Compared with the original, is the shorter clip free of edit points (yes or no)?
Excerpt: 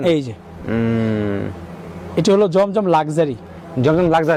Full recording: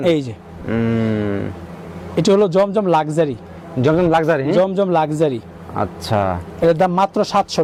yes